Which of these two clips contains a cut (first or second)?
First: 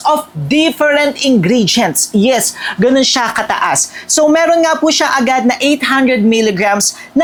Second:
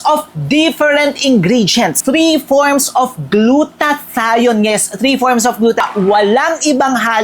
second